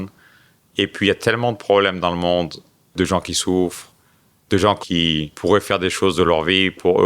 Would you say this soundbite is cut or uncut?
cut